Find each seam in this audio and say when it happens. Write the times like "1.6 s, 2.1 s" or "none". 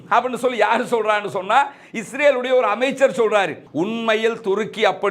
3.6 s